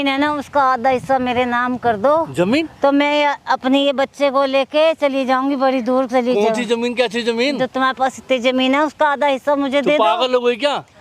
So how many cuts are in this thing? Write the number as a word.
zero